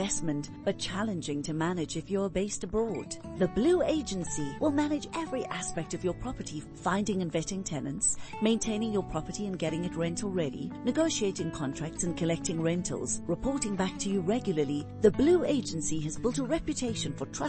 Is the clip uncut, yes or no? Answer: yes